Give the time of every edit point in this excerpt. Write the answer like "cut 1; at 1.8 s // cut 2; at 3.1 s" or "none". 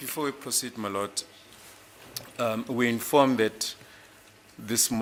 none